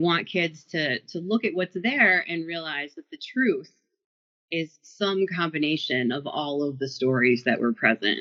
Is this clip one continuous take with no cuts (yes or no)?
yes